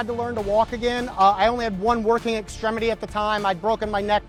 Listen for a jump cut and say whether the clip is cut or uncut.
uncut